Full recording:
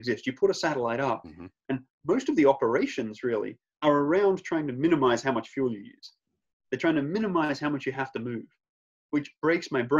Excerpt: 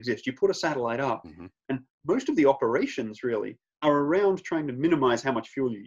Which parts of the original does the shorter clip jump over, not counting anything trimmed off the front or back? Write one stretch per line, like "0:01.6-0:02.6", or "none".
none